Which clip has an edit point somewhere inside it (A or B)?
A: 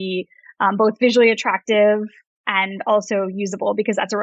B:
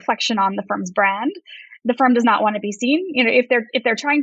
B